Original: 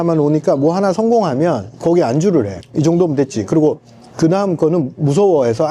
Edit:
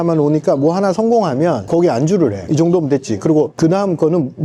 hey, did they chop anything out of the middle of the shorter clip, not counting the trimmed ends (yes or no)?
yes